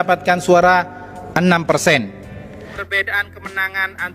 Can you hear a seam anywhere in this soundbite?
yes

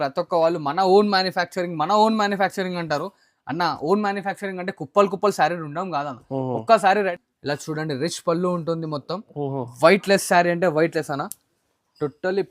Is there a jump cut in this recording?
yes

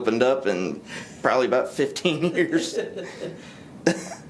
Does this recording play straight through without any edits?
yes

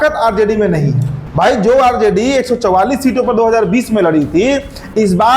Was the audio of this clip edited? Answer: yes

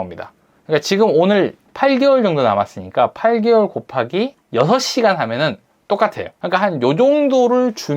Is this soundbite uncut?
no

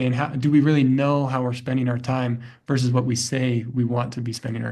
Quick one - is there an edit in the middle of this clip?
no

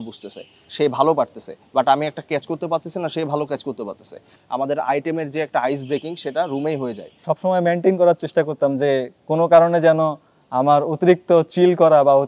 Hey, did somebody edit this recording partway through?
yes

